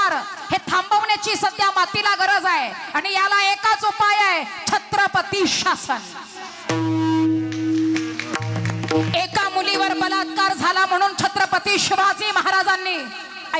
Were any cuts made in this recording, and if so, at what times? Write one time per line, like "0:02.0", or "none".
0:09.0